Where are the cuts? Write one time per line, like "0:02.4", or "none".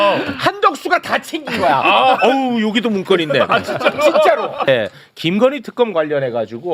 0:04.7